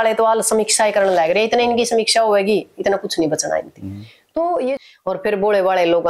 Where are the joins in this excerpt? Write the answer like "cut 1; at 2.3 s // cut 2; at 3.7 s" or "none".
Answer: cut 1; at 4.8 s